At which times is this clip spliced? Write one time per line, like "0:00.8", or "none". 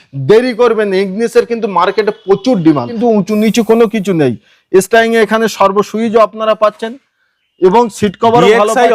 0:02.9